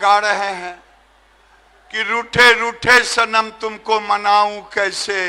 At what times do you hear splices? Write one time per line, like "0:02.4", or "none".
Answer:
none